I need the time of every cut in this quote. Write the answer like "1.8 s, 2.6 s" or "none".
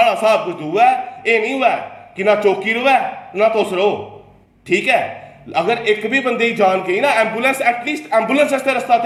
none

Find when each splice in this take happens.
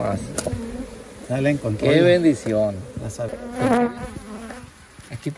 3.3 s

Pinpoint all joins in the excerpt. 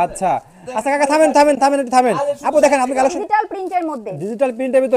3.1 s

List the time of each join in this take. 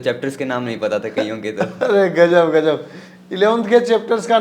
none

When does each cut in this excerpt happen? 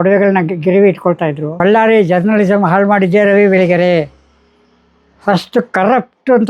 1.5 s

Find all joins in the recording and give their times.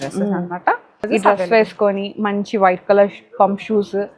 1.1 s

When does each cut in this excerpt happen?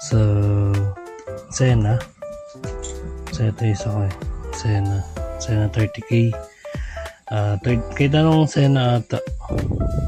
none

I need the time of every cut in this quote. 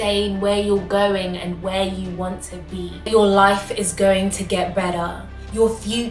3.1 s

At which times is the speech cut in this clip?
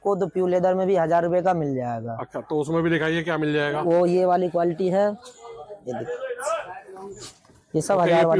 none

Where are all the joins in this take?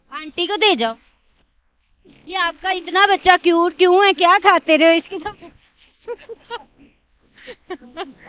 2.2 s

